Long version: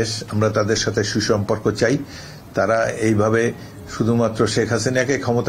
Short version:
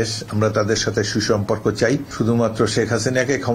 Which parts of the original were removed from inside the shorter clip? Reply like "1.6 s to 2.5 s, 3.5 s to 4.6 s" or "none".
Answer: 2.1 s to 3.9 s